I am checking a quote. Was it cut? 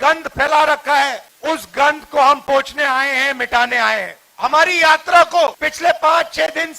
yes; 3 cuts; at 1.3 s, 4.2 s, 5.7 s

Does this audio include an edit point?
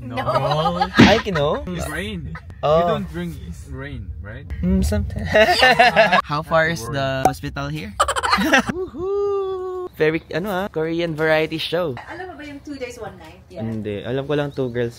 yes; 4 cuts; at 5.3 s, 8.7 s, 9.9 s, 13.4 s

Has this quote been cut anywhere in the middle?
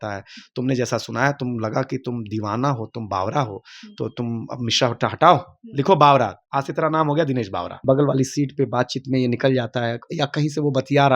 yes; 1 cut; at 7.7 s

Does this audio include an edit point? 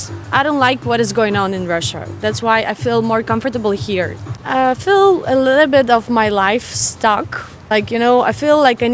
no; 0 cuts

